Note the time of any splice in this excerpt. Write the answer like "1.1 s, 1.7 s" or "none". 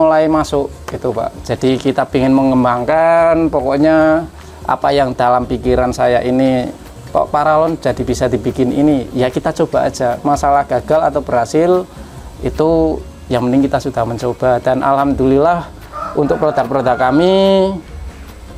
none